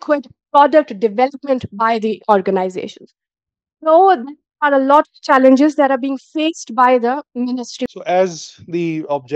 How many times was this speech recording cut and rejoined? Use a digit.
1